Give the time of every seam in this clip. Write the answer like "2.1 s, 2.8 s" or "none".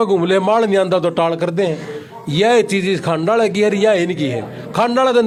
none